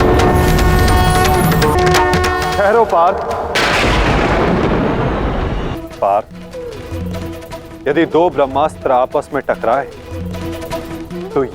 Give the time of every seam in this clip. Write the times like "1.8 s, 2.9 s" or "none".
1.8 s, 5.8 s